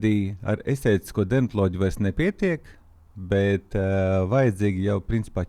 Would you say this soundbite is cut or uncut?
uncut